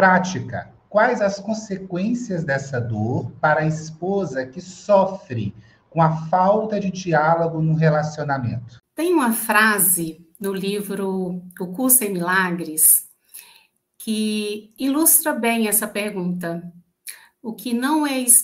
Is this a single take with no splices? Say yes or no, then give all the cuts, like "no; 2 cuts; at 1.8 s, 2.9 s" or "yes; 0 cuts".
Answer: yes; 0 cuts